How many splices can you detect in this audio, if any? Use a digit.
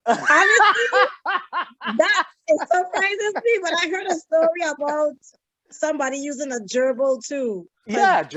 0